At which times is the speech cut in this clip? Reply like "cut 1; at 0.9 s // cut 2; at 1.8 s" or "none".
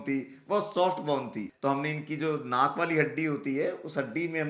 cut 1; at 1.5 s